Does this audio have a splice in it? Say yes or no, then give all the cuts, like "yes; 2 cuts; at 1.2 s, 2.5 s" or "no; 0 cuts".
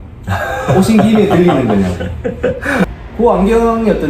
yes; 1 cut; at 3.0 s